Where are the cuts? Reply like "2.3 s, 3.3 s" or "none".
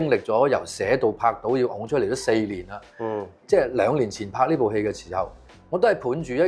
none